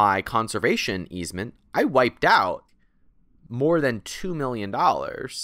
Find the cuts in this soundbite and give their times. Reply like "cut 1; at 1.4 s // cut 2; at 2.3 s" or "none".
cut 1; at 2.7 s